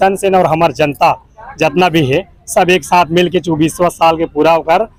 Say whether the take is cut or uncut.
uncut